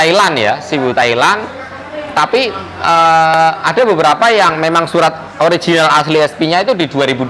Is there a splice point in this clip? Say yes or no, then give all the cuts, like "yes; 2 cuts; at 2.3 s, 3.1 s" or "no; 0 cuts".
no; 0 cuts